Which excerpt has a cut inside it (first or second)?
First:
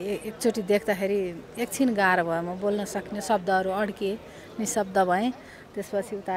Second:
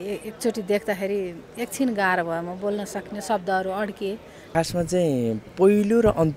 second